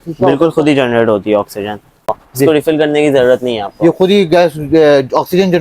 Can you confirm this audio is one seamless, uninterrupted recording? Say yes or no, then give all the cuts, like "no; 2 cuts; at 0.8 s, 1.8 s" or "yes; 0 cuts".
no; 1 cut; at 2.0 s